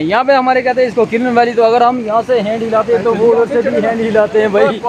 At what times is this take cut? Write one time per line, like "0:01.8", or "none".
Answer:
none